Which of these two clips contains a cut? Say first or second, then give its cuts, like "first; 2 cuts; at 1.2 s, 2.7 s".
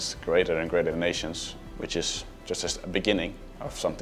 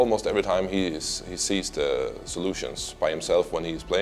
first; 2 cuts; at 1.5 s, 2.3 s